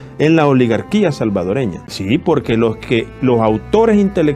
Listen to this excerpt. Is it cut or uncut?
cut